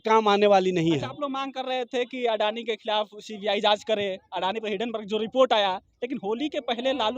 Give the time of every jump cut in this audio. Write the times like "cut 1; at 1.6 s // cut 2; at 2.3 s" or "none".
none